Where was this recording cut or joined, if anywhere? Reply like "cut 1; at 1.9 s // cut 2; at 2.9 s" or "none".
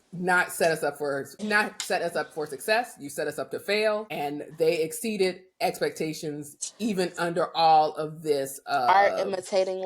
cut 1; at 1.4 s // cut 2; at 4.1 s